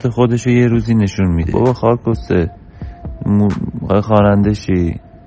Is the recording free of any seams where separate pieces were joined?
no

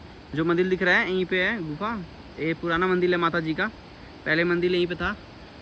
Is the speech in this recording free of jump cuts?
yes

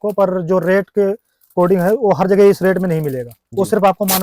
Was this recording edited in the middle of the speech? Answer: no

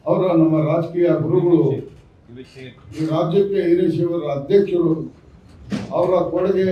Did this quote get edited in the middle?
no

